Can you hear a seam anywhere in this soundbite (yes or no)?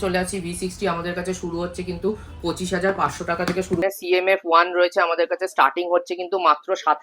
yes